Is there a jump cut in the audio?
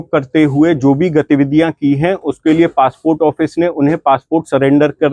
no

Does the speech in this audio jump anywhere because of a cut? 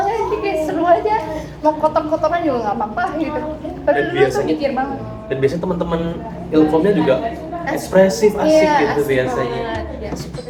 no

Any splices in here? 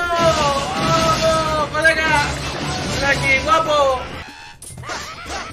yes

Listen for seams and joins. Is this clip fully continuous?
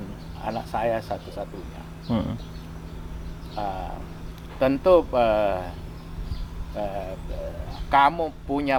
yes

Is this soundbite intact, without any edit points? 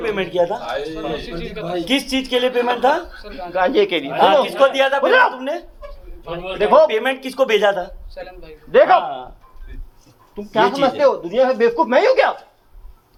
yes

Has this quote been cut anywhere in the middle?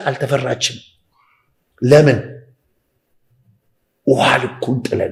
no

